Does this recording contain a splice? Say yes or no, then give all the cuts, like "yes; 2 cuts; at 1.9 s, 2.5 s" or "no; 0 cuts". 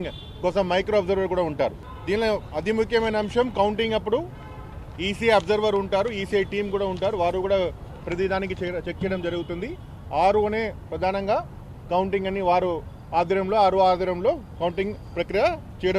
yes; 1 cut; at 1.9 s